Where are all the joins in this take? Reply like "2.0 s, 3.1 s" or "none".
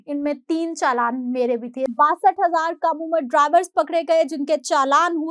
1.9 s